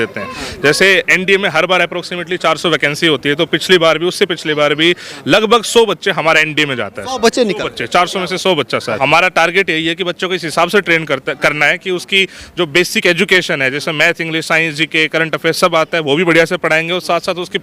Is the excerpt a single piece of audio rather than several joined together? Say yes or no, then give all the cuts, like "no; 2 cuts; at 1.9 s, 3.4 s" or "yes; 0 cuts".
no; 1 cut; at 9.0 s